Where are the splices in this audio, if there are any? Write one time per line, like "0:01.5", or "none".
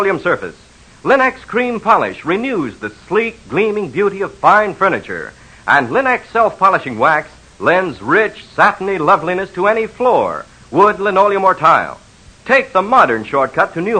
0:05.0